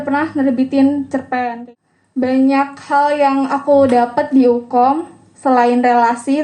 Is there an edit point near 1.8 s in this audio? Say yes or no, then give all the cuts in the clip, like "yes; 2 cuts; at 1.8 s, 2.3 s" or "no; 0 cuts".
yes; 1 cut; at 1.8 s